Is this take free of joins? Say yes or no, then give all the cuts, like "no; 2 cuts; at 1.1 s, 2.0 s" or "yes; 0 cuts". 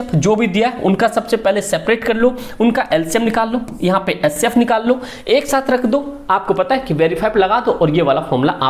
yes; 0 cuts